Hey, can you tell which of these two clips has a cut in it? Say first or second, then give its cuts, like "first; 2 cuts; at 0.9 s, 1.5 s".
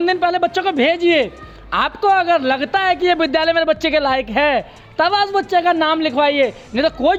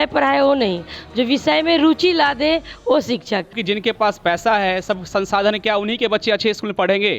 second; 1 cut; at 3.6 s